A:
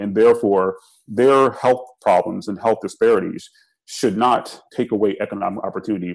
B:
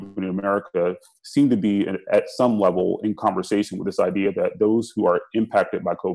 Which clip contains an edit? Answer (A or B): A